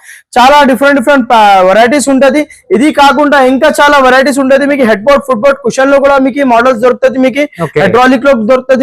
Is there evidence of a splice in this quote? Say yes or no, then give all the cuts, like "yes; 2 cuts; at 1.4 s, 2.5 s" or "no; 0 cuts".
no; 0 cuts